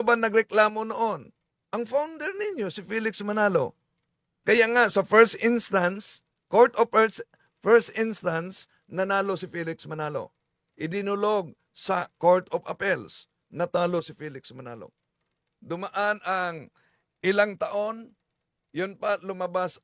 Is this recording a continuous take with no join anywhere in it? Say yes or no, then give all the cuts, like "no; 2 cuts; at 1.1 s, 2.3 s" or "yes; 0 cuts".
yes; 0 cuts